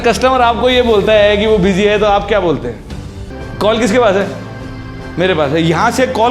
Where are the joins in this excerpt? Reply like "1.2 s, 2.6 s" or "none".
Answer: 3.4 s